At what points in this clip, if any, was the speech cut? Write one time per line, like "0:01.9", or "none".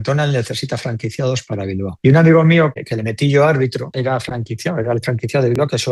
none